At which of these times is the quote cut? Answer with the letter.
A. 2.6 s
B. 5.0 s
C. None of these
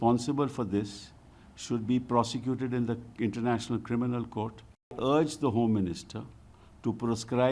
B